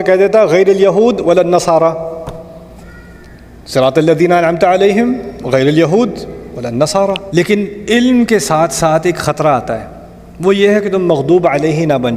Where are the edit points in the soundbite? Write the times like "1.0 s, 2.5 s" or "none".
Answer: 7.2 s

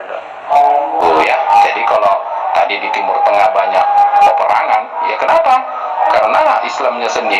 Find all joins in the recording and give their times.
1.0 s

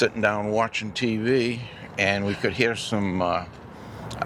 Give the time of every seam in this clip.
none

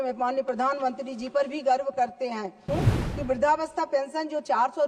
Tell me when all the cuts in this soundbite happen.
2.7 s

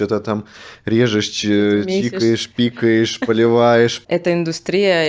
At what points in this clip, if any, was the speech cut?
4.0 s

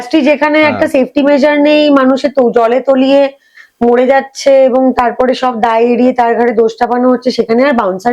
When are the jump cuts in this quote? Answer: none

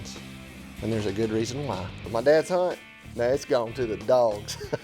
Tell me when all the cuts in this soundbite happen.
2.0 s

